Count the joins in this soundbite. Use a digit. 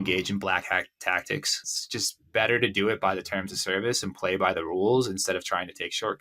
1